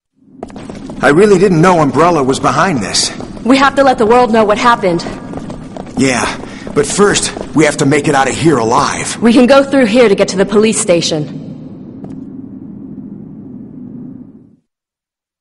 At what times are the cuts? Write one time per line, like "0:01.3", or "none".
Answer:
0:03.9